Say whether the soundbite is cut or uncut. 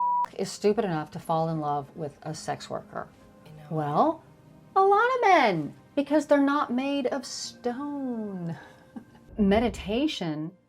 cut